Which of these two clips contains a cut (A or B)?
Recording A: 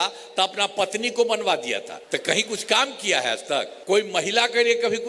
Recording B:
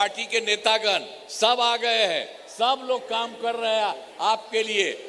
A